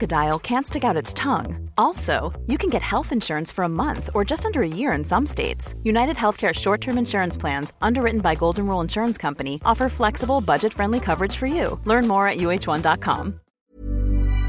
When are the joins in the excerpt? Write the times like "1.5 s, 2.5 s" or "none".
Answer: 13.5 s